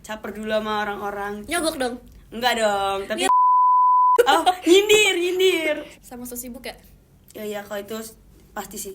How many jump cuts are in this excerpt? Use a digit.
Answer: 1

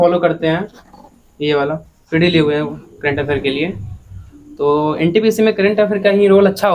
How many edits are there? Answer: 1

